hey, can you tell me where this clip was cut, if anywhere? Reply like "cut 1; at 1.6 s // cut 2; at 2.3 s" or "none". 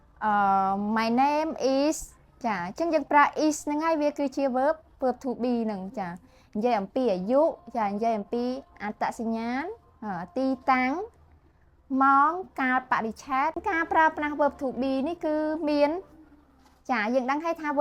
cut 1; at 13.6 s